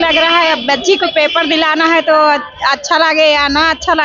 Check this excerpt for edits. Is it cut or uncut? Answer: uncut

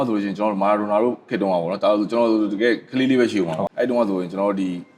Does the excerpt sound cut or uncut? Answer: cut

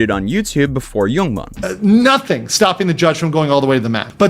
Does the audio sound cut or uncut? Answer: cut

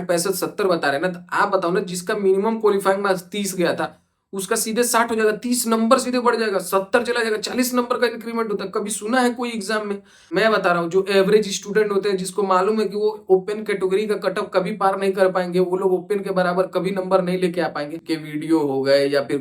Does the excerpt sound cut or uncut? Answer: cut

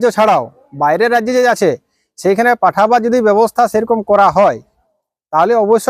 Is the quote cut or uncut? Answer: uncut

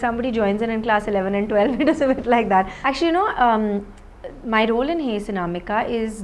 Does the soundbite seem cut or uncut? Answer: cut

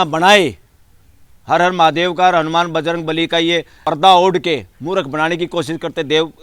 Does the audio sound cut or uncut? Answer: cut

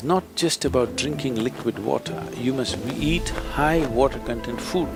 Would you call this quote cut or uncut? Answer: uncut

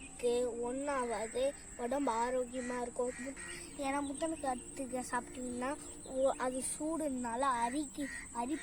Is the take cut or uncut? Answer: cut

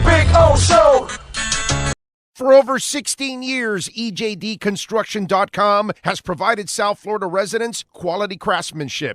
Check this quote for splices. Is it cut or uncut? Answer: cut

